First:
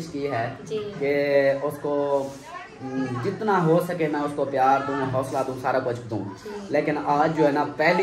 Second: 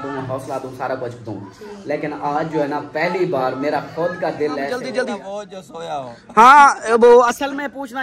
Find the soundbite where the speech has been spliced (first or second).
second